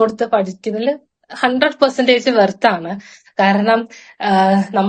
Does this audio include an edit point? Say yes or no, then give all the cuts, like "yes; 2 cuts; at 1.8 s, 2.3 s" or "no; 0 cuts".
no; 0 cuts